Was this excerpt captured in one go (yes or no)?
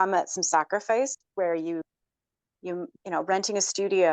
yes